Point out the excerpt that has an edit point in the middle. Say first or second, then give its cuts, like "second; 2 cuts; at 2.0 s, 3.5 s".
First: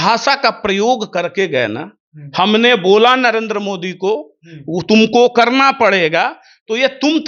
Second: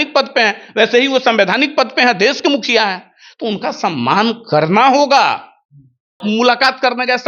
second; 1 cut; at 6.2 s